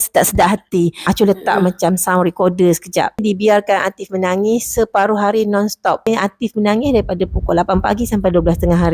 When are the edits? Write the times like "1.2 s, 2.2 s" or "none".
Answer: 1.0 s, 3.2 s, 6.1 s